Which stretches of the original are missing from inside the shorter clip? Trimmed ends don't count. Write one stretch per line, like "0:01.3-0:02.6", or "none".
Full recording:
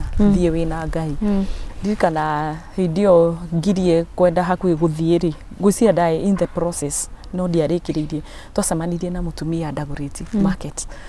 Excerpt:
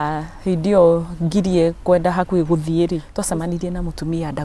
0:05.4-0:08.5